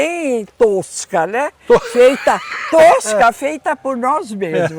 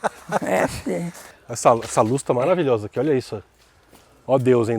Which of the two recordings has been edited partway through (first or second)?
second